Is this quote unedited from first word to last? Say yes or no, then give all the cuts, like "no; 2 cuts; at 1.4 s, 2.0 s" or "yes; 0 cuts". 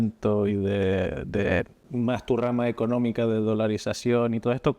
no; 1 cut; at 1.8 s